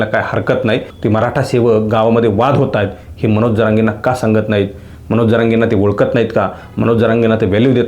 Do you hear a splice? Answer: yes; 1 cut; at 0.9 s

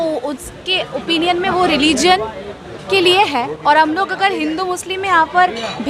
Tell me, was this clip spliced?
no; 0 cuts

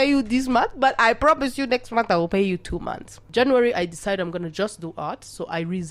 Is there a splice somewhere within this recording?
yes; 1 cut; at 3.2 s

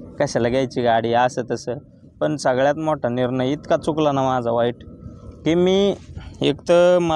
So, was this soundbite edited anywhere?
no; 0 cuts

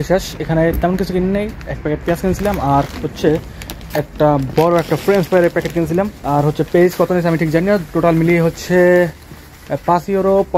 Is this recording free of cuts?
yes; 0 cuts

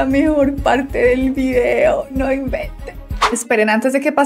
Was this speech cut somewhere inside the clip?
yes; 1 cut; at 3.2 s

